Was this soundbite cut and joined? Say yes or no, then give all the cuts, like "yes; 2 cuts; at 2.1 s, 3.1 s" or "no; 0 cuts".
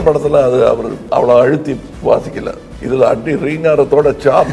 yes; 3 cuts; at 0.9 s, 1.9 s, 2.7 s